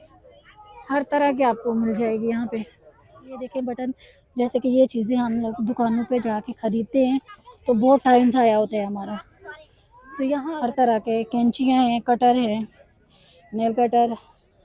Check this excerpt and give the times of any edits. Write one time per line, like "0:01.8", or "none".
0:03.4
0:10.5